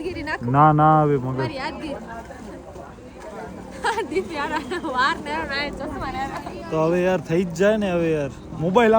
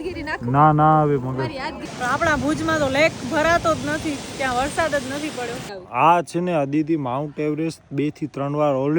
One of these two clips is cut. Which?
second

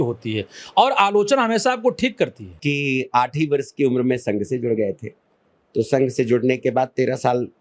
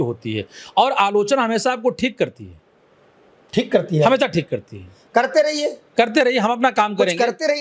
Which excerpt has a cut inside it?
first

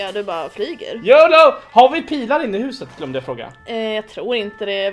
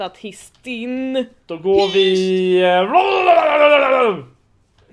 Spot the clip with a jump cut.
first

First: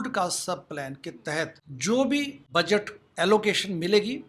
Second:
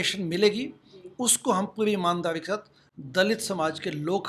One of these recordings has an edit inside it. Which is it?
first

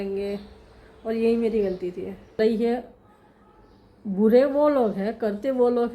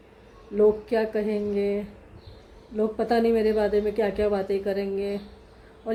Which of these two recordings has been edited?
first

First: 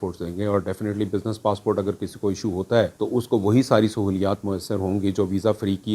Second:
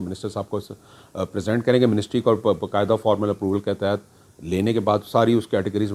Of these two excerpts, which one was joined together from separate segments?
first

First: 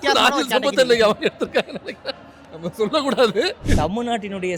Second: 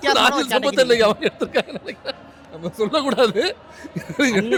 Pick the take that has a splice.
first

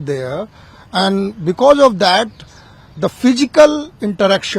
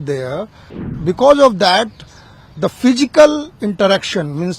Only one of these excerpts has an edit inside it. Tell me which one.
second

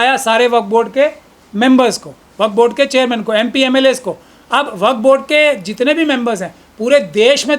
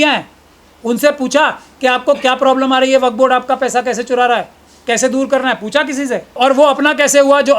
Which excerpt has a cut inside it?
second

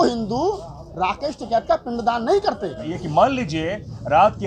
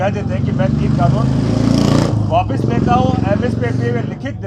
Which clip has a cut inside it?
first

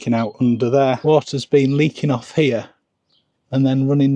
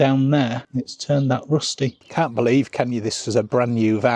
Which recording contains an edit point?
second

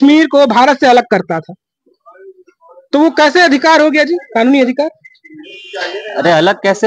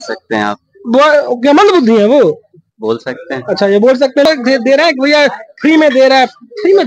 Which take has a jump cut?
second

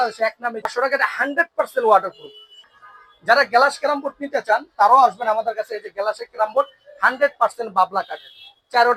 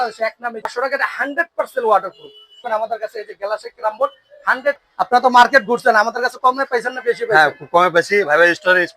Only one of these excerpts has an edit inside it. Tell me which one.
second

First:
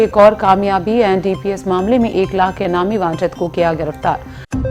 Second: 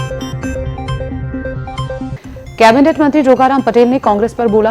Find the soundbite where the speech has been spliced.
second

